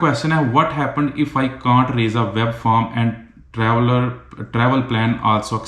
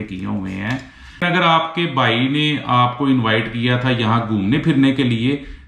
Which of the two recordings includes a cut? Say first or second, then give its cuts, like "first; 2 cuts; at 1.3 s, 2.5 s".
second; 1 cut; at 1.2 s